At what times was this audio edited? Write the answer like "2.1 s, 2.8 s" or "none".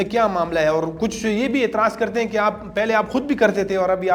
none